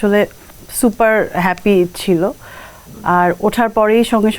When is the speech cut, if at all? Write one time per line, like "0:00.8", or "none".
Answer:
none

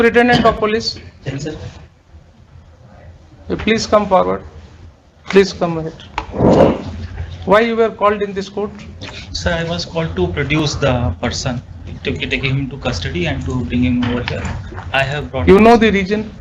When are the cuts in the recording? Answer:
none

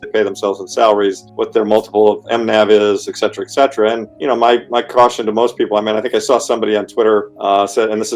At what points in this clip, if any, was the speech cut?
0:01.3
0:04.1
0:07.3

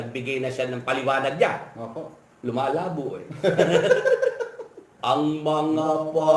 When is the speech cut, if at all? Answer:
0:04.9

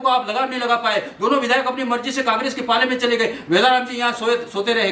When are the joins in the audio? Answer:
none

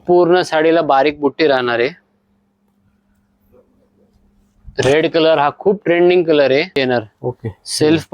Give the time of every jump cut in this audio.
0:06.8

